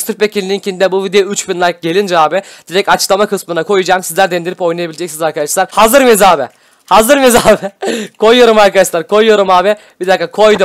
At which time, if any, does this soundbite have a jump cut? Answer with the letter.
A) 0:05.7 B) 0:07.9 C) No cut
A